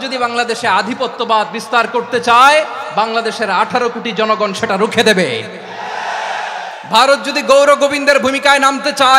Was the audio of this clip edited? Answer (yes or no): no